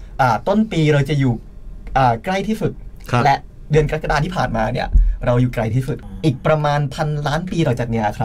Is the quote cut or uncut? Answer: cut